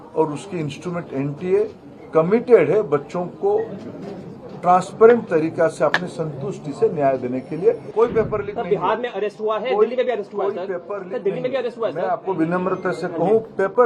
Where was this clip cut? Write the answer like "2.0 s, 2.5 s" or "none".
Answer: 7.9 s